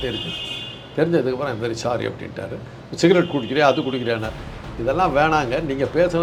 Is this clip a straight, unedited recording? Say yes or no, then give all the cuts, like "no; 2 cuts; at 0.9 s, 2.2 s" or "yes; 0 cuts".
yes; 0 cuts